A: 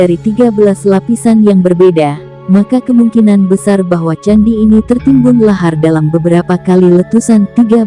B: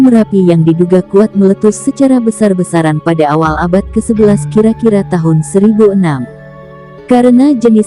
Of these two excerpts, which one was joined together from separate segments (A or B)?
B